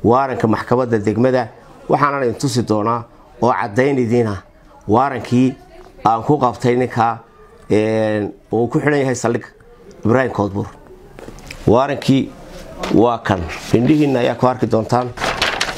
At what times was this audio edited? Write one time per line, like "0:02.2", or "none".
0:13.6